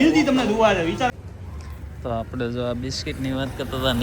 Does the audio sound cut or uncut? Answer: cut